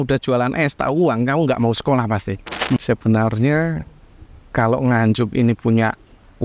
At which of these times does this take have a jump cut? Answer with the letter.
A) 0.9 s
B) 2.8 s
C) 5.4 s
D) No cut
B